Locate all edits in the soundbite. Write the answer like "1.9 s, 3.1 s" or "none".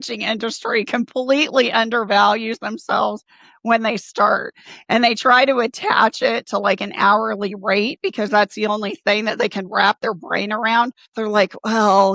none